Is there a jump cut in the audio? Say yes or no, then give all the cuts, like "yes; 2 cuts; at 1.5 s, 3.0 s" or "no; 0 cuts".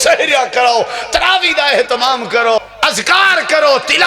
yes; 1 cut; at 2.6 s